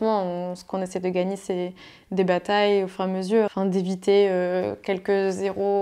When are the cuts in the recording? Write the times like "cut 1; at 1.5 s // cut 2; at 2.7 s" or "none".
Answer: cut 1; at 3.5 s